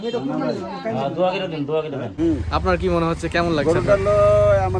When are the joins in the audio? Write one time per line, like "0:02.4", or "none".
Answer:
0:02.0